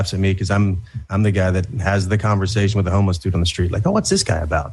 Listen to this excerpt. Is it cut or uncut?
uncut